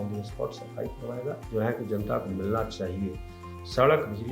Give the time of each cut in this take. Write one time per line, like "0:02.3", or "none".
0:01.4